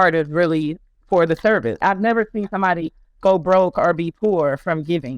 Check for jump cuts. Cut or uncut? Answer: cut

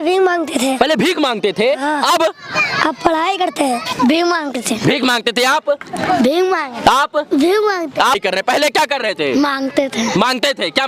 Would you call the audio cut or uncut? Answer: cut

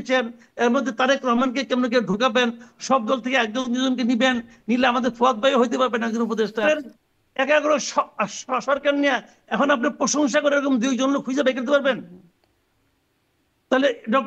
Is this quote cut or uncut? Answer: cut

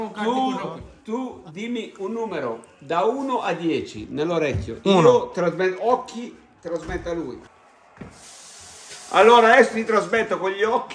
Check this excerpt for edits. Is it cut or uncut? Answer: cut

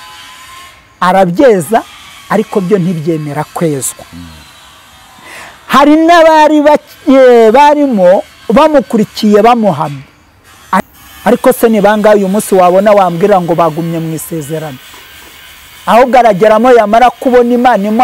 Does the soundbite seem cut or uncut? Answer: cut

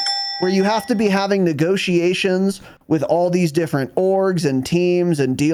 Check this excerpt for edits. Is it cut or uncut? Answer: uncut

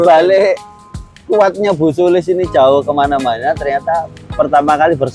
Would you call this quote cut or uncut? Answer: uncut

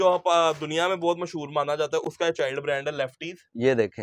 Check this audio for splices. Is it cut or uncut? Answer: uncut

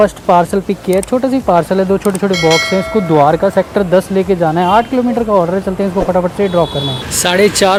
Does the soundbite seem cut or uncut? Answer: uncut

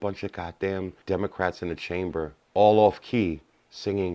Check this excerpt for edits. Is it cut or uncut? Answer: cut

